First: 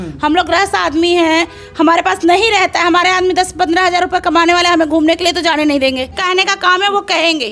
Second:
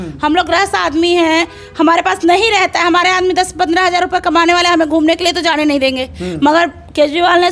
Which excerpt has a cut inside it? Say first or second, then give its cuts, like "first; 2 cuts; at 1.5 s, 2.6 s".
first; 1 cut; at 6.2 s